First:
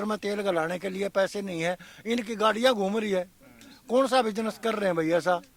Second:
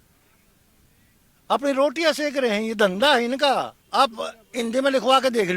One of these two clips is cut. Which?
second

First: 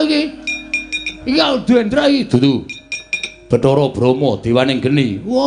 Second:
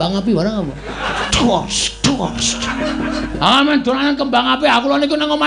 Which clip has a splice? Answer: second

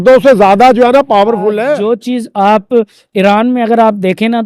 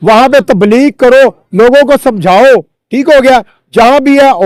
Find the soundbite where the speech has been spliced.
first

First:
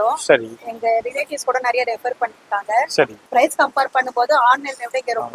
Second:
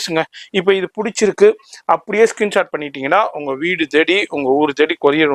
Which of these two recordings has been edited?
first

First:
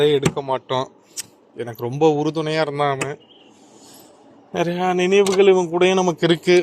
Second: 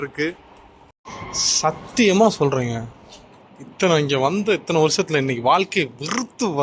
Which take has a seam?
second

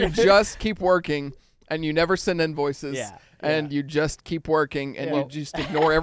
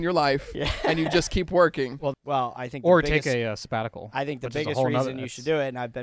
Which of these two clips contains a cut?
second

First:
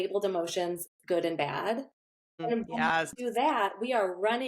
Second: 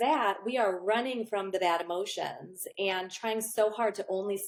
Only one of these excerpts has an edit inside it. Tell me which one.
first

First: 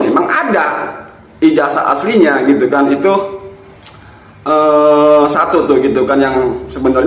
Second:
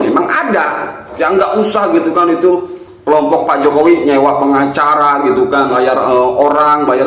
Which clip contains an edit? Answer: second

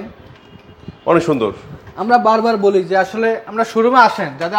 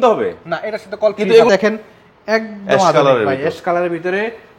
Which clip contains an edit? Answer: second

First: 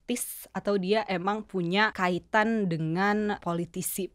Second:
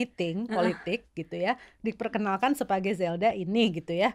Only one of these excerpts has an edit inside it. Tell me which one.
first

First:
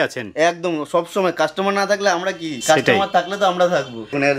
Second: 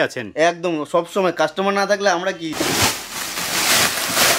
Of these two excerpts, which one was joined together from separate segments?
second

